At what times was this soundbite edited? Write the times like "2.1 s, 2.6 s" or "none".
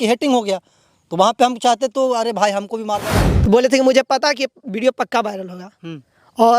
3.0 s